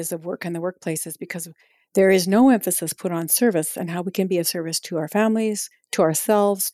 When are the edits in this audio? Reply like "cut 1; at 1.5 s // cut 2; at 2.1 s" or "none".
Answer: none